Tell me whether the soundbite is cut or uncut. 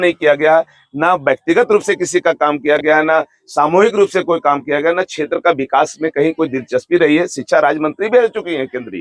uncut